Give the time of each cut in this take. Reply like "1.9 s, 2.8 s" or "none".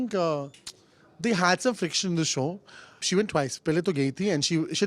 3.0 s